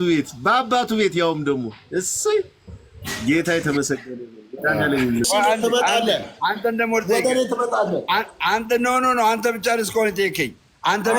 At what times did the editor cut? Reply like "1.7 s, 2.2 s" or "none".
5.3 s